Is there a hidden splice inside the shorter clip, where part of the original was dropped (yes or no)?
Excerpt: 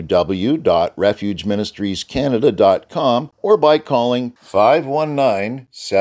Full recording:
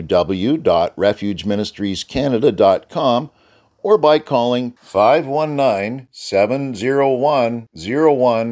yes